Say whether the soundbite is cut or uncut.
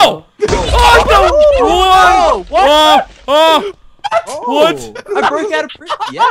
uncut